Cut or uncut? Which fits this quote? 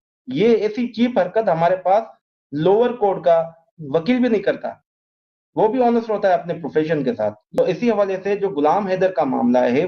cut